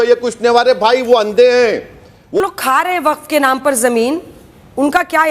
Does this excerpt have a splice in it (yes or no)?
yes